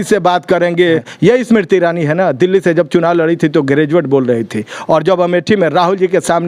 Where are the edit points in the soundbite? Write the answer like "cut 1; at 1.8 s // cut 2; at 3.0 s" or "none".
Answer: cut 1; at 1.0 s